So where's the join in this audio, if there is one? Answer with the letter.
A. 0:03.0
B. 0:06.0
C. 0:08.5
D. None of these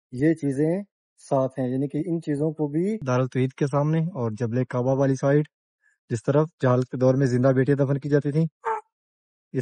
A